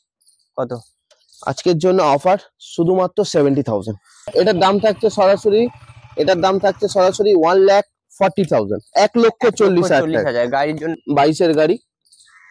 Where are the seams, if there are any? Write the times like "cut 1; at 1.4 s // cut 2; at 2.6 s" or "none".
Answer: cut 1; at 4.2 s // cut 2; at 11.0 s